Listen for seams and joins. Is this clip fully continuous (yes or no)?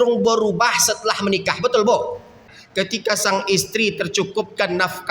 no